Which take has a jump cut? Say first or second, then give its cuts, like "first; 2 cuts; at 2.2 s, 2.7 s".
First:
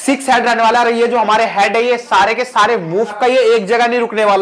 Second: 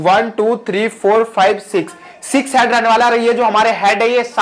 first; 1 cut; at 3.2 s